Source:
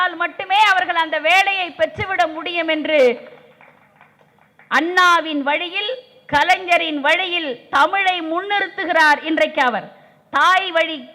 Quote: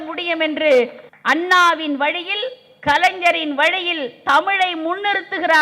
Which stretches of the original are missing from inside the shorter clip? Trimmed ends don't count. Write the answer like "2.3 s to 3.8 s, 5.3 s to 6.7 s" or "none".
3.3 s to 4.5 s